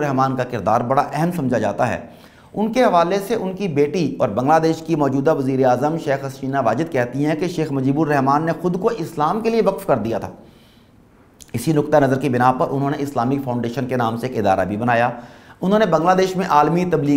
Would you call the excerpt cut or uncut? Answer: uncut